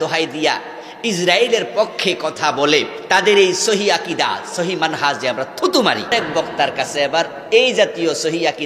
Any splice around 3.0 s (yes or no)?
yes